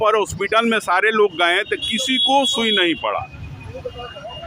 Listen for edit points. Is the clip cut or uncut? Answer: uncut